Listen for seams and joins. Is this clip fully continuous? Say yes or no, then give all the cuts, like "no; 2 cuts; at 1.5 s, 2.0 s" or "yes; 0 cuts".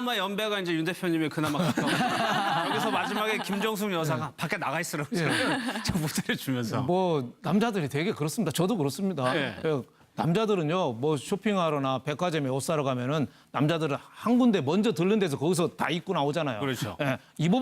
no; 1 cut; at 7.8 s